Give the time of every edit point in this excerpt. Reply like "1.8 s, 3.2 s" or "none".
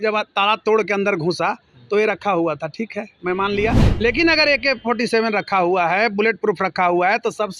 none

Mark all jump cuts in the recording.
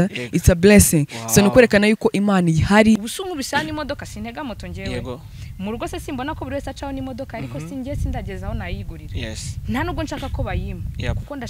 3.1 s

